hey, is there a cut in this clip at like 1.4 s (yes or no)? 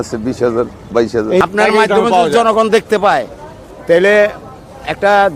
yes